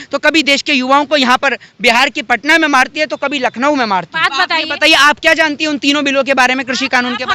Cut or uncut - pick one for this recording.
cut